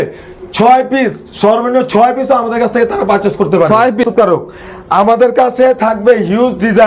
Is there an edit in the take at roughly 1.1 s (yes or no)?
no